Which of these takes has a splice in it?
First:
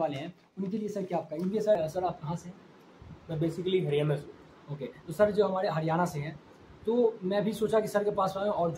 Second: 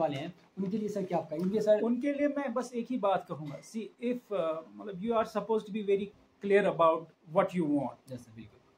first; 1 cut; at 1.8 s

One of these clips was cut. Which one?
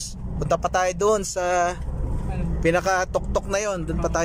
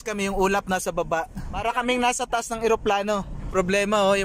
second; 2 cuts; at 1.5 s, 3.5 s

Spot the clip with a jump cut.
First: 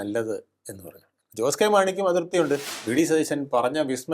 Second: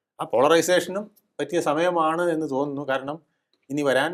first; 1 cut; at 2.7 s

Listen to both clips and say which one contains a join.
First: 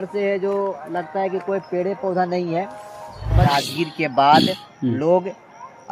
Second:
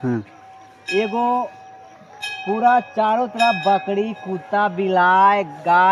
first; 1 cut; at 3.4 s

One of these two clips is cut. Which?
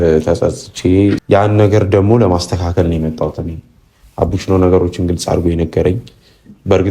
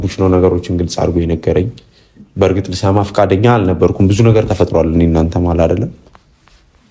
first; 1 cut; at 1.2 s

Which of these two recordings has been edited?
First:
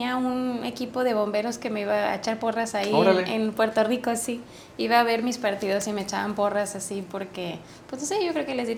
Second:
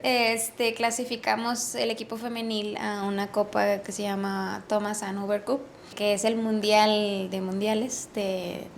second; 1 cut; at 5.9 s

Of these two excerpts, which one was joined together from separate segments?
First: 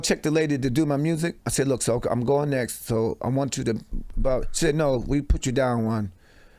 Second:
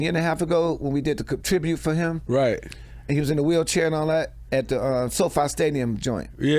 first; 1 cut; at 1.4 s

